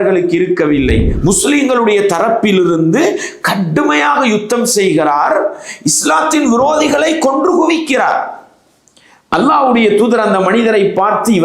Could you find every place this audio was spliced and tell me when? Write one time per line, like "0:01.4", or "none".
0:01.1